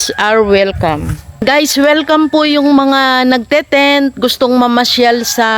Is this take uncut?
no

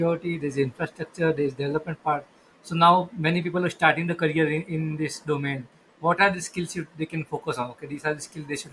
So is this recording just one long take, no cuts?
yes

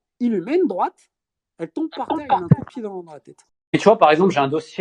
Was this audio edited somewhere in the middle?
yes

